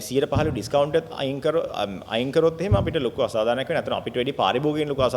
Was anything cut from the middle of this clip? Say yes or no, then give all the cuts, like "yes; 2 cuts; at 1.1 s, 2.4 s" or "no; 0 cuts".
no; 0 cuts